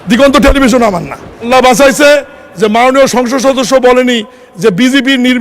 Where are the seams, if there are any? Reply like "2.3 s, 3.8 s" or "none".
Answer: 1.5 s